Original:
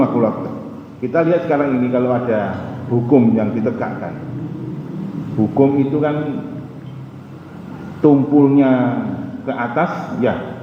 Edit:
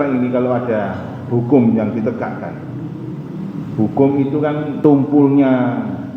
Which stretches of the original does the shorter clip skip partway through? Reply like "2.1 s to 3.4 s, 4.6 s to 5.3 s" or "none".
6.3 s to 7.9 s